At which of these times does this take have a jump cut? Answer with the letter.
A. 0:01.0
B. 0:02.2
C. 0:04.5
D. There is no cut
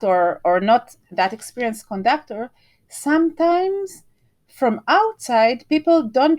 D